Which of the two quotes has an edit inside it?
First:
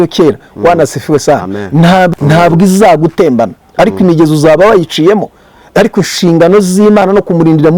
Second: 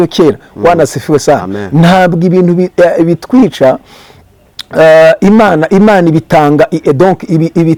first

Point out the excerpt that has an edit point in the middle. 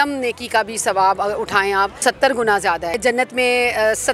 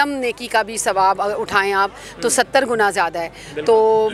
first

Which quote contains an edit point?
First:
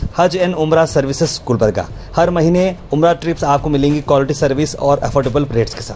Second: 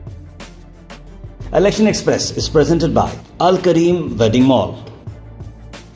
second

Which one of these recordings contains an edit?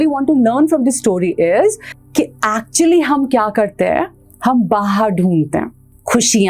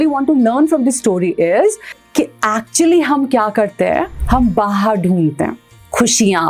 second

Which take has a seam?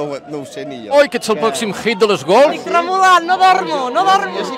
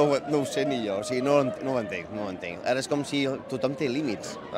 first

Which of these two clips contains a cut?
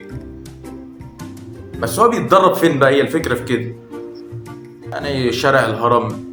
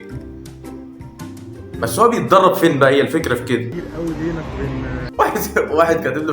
second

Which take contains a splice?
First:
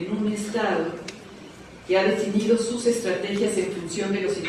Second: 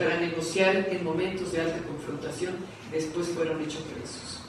second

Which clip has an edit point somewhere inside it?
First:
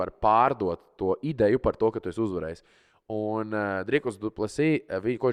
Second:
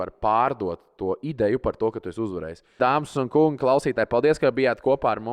second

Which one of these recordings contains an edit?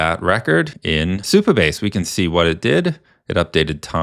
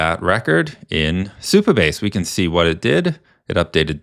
first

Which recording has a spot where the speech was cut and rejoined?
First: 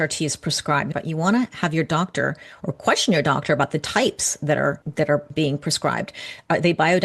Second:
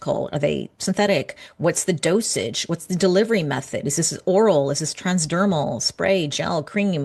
first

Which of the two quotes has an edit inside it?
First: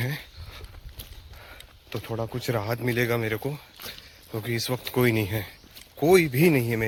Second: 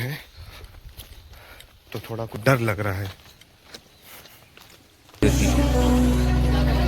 second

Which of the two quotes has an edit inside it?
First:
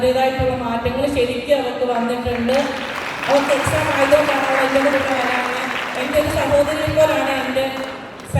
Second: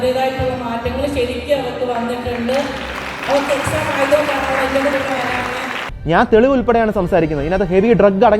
second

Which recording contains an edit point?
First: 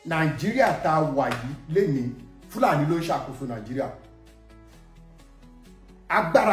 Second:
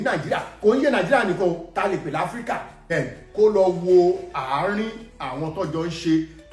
second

